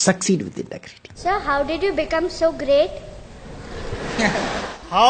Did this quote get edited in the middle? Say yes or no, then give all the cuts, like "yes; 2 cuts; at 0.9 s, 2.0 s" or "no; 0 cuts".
yes; 1 cut; at 1.2 s